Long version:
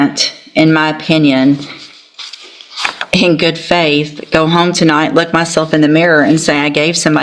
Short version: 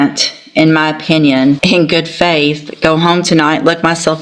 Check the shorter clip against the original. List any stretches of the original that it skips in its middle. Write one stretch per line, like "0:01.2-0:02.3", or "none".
0:01.6-0:03.1

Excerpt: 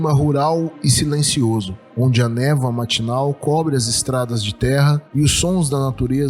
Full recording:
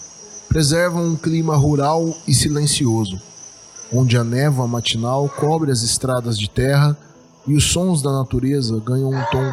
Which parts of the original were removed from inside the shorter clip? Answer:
0:03.2-0:03.7
0:07.0-0:07.4

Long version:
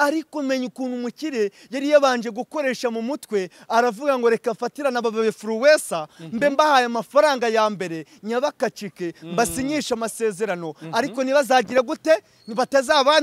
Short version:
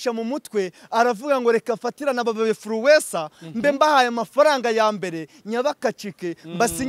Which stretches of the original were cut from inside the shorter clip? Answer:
none

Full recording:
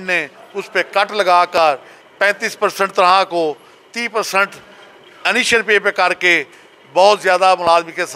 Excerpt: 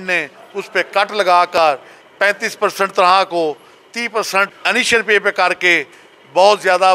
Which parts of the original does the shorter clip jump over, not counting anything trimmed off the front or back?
0:04.6-0:05.2

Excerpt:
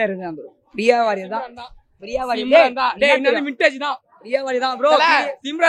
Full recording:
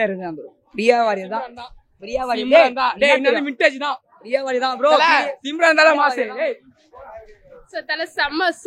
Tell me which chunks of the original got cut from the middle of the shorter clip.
none

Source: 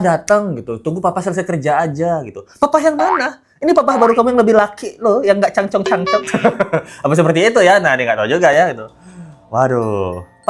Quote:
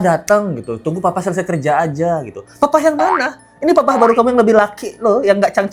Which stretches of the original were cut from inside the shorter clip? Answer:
none

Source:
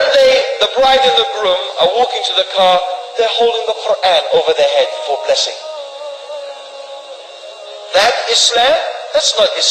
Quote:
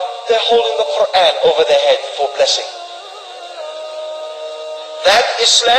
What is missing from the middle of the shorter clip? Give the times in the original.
none

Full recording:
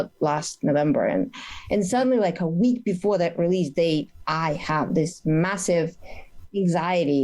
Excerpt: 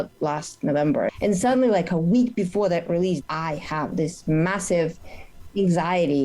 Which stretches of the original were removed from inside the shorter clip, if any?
0:01.1-0:01.6
0:03.7-0:04.2

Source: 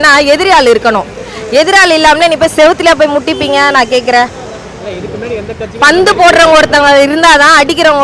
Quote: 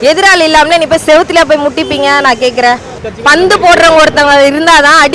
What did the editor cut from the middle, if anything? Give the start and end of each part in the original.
0:04.5-0:05.6

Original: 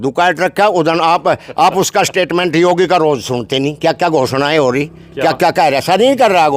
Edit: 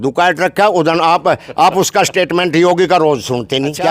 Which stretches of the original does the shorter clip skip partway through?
none

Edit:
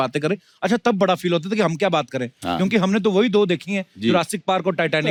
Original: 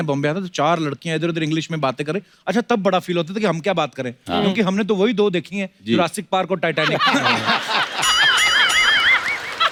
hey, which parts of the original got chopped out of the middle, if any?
none

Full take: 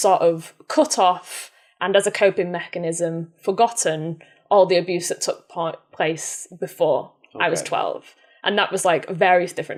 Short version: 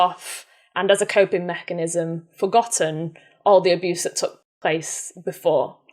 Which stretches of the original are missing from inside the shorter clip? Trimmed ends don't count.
0:05.5-0:05.8

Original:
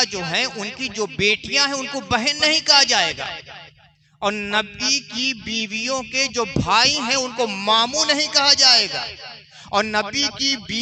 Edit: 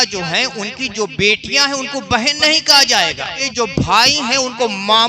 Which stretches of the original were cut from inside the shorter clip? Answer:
0:03.4-0:06.2

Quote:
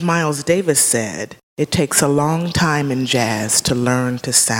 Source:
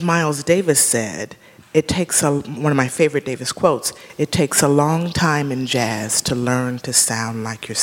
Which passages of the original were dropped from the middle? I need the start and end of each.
0:01.4-0:04.0

